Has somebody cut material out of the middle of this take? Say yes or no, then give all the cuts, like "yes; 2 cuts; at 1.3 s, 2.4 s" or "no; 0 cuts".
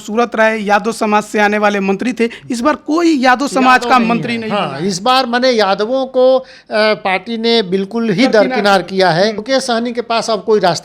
yes; 1 cut; at 9.4 s